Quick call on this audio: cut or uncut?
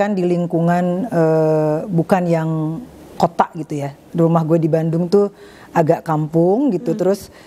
uncut